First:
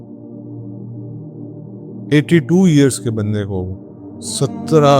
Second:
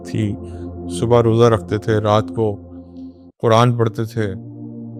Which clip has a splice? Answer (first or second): first